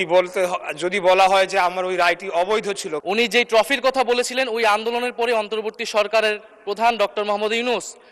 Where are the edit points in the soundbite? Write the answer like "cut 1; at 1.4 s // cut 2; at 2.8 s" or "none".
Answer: cut 1; at 2.9 s